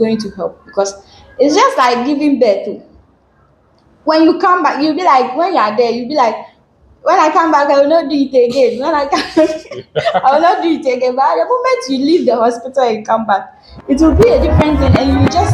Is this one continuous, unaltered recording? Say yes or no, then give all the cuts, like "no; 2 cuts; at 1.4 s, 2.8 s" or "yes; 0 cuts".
yes; 0 cuts